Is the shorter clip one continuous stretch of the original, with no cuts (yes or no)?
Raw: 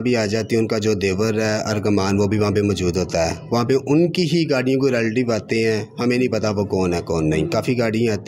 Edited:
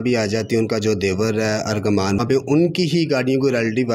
no